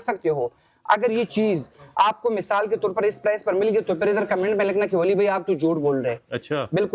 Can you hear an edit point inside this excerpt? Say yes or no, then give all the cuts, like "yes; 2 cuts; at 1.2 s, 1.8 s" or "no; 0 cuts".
no; 0 cuts